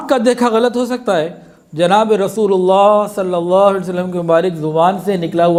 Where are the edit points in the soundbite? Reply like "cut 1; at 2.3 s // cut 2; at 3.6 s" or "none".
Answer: none